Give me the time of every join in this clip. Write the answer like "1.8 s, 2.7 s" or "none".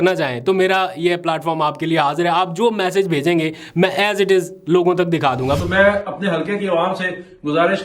5.6 s